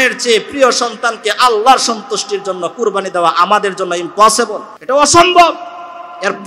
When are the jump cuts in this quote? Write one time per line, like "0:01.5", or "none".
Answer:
0:04.7